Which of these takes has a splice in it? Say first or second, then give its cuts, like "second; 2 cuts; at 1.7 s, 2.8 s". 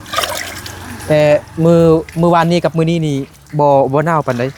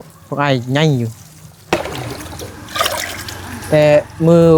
second; 1 cut; at 1.6 s